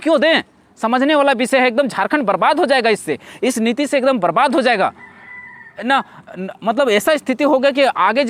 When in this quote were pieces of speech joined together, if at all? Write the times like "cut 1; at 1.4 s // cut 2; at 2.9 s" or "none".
none